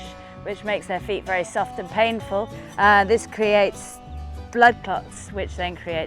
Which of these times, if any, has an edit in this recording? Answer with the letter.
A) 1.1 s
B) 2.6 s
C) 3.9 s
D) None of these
B